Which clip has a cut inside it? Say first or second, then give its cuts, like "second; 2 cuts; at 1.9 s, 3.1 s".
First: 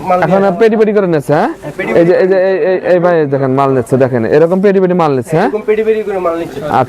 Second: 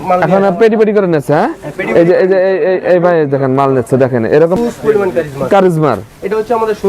second; 1 cut; at 4.6 s